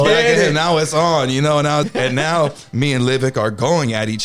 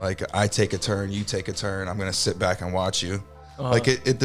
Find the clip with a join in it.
first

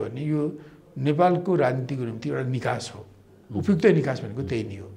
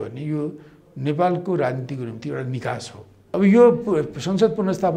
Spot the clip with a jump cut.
second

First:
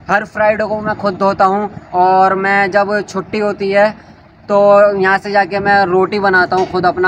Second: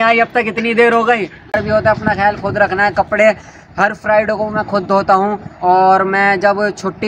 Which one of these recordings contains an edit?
second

